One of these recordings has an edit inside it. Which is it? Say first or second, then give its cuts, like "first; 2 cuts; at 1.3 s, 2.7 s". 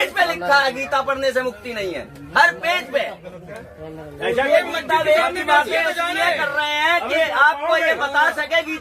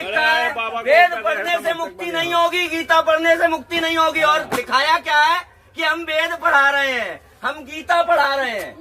first; 1 cut; at 4.5 s